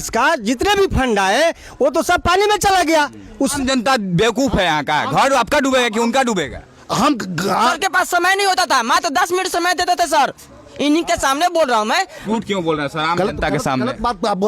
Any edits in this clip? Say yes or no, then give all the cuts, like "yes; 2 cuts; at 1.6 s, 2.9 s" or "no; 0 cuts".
yes; 3 cuts; at 3.5 s, 7.7 s, 12.2 s